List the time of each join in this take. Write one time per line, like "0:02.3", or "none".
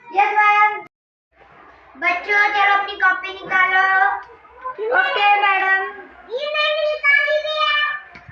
0:01.0